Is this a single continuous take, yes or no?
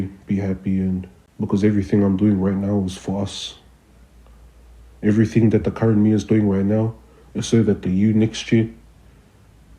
no